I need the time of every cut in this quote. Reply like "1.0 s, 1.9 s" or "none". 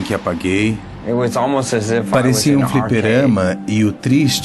1.0 s